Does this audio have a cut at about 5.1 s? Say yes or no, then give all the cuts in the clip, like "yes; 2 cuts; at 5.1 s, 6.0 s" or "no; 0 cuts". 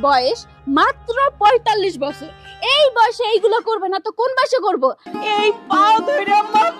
yes; 1 cut; at 5.1 s